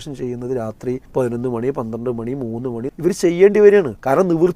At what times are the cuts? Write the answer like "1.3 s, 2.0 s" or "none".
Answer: 1.0 s, 2.9 s, 3.8 s